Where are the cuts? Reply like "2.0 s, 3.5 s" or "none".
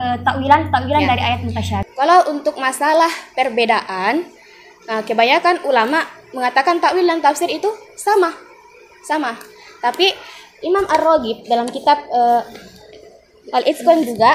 1.8 s